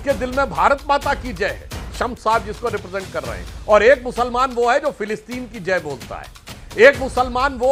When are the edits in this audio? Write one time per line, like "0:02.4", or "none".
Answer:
none

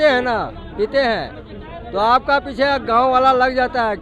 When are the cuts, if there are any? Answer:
none

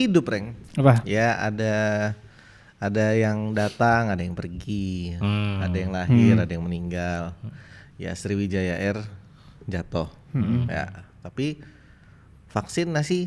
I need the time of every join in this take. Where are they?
none

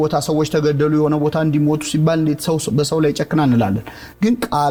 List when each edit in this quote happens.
none

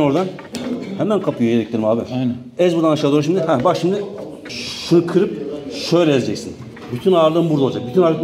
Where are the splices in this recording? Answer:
0:04.6

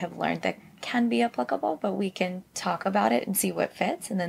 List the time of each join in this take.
0:02.5

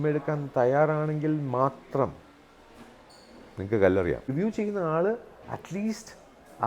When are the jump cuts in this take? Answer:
0:04.3

